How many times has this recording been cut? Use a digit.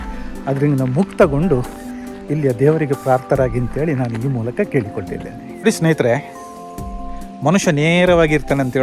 1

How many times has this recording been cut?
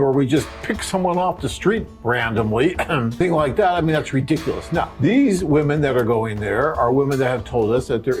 1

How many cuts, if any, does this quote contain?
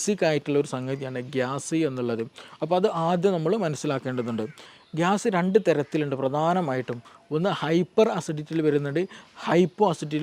1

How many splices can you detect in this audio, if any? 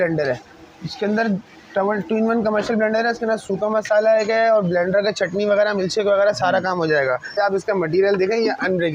1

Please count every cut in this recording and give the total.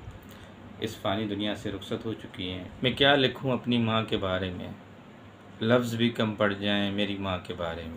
1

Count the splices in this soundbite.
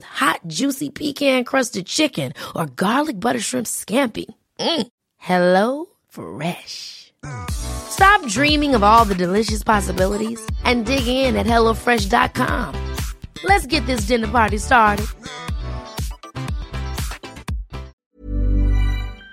1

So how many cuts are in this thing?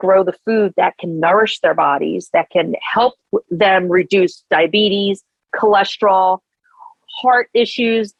0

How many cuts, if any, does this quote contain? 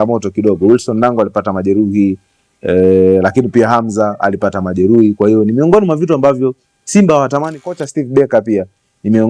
1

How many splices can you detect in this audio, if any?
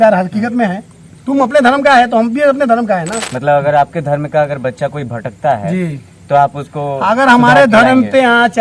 1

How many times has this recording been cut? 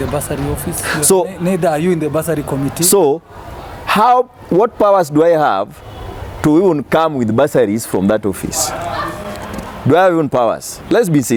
0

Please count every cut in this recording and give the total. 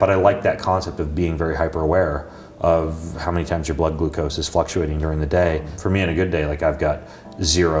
1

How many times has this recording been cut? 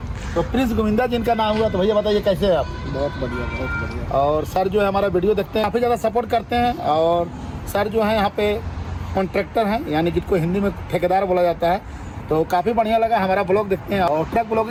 0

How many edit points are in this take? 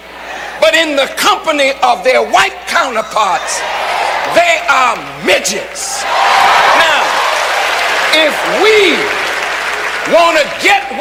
0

